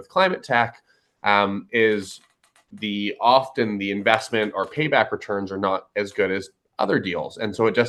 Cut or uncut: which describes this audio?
uncut